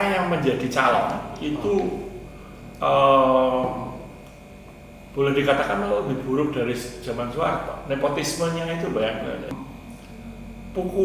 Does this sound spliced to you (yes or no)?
yes